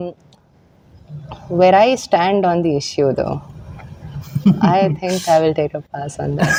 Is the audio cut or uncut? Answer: uncut